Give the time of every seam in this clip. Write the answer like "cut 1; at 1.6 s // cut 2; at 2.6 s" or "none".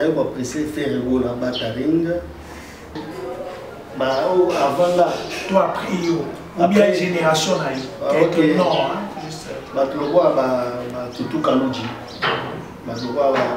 cut 1; at 3.0 s